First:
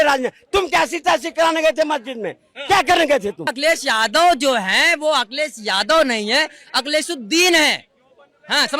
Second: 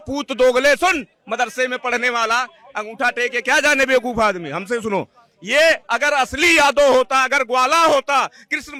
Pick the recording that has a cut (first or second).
first